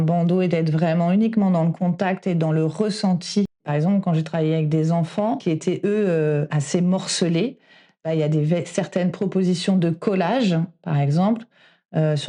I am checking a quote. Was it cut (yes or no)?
yes